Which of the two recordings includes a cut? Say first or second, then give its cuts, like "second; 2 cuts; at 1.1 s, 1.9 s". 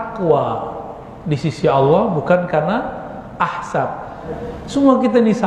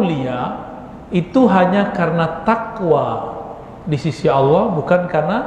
first; 1 cut; at 4.2 s